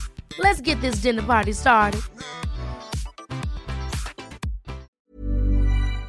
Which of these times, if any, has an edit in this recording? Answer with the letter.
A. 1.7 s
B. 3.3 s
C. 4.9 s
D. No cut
C